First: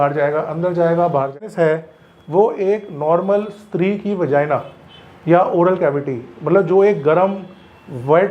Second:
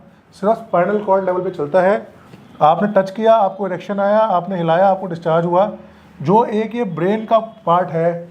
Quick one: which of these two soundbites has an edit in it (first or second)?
first